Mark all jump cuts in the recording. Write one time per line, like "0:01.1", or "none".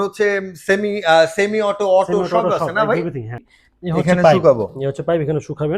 0:03.4